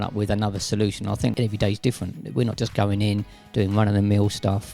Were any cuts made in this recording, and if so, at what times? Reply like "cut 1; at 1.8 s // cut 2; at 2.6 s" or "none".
cut 1; at 1.3 s